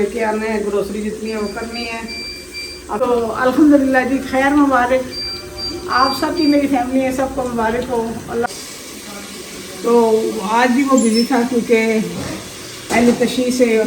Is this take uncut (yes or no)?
no